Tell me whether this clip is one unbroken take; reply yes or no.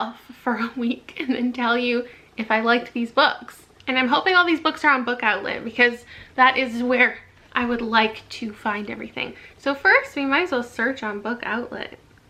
yes